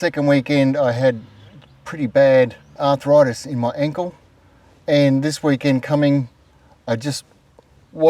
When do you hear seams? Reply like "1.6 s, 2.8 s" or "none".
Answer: 2.6 s